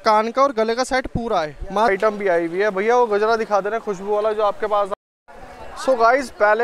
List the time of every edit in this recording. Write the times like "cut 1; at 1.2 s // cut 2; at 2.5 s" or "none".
cut 1; at 1.9 s // cut 2; at 4.9 s